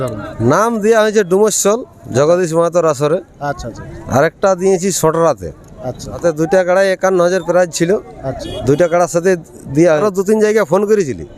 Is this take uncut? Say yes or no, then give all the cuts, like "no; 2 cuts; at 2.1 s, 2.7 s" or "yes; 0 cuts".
no; 2 cuts; at 6.2 s, 10.0 s